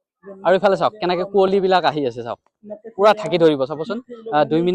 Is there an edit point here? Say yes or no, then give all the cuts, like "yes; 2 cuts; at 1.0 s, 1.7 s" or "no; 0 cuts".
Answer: no; 0 cuts